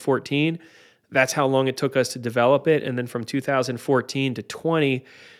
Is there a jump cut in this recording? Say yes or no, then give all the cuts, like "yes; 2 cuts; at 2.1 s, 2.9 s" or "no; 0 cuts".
no; 0 cuts